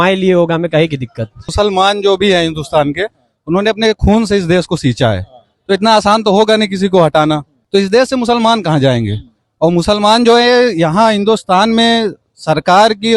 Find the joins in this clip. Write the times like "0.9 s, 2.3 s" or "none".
1.5 s, 7.5 s